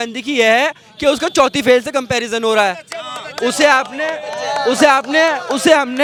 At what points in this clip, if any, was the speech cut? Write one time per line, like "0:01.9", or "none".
none